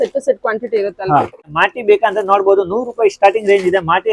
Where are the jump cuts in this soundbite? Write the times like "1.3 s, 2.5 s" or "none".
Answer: 1.4 s